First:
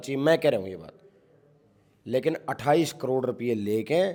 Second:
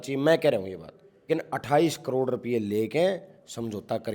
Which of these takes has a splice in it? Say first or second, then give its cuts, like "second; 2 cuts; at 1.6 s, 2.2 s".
second; 1 cut; at 1.3 s